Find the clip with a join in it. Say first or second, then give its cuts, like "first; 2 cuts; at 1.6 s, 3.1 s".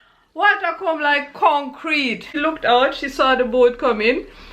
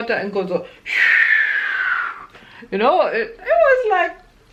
first; 1 cut; at 2.4 s